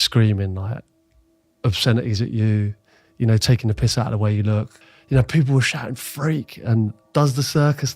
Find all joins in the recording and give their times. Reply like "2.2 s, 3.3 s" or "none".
4.8 s